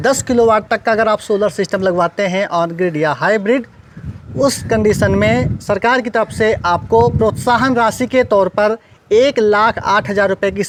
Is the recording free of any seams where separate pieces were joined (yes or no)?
yes